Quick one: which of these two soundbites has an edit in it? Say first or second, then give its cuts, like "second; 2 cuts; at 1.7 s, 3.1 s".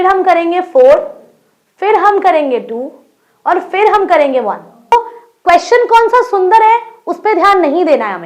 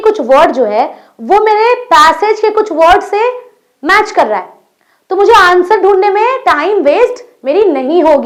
first; 1 cut; at 4.9 s